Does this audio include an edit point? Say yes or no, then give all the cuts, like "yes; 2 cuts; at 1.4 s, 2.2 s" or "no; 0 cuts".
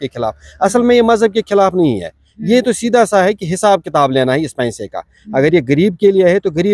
no; 0 cuts